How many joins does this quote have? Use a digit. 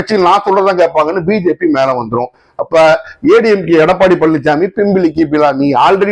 0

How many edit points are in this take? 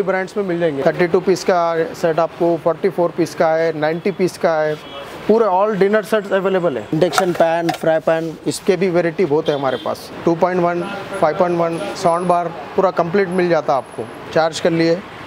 4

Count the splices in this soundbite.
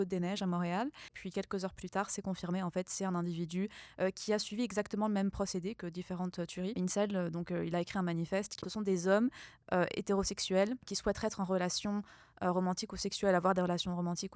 4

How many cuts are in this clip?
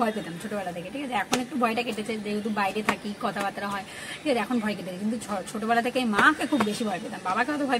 0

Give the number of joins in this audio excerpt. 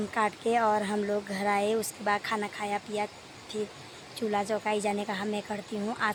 0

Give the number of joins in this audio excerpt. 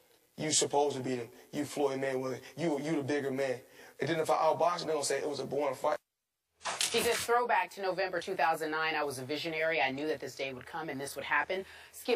1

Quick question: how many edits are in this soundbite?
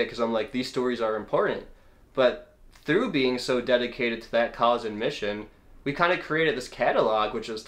0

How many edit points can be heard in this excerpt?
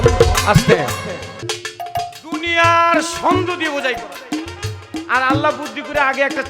1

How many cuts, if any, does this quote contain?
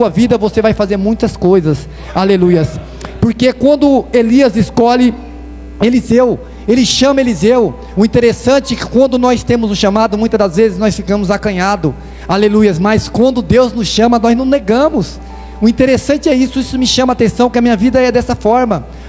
0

